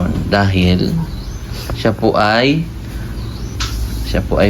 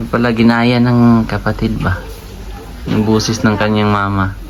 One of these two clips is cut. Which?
first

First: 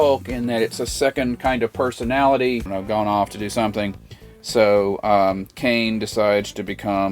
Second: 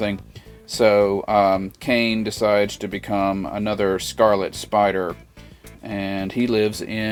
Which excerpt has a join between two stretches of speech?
first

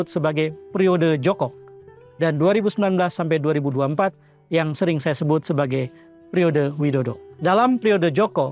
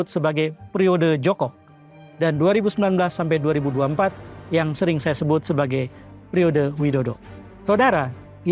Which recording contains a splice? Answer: second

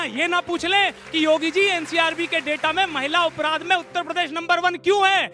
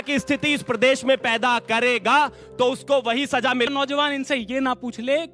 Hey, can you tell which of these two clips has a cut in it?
second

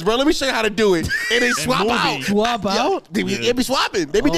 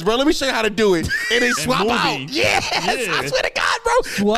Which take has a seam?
first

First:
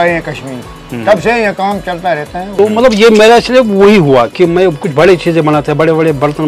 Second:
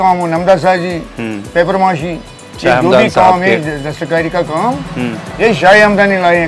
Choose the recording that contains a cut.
first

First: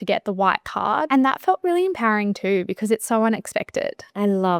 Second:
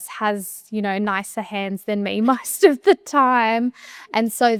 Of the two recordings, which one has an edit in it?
first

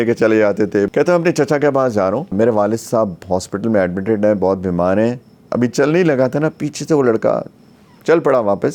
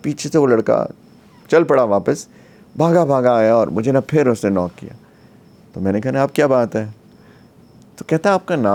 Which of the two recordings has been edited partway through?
first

